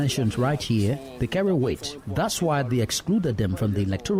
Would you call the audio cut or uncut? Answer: uncut